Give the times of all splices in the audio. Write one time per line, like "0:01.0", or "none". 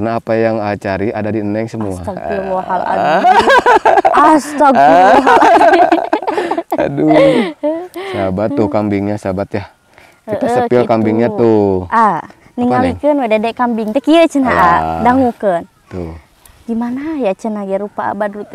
none